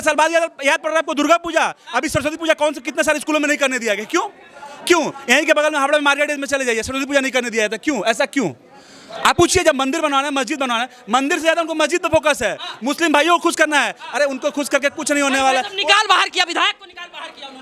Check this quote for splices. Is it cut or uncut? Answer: uncut